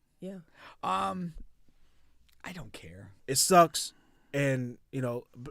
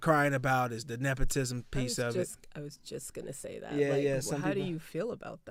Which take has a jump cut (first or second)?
first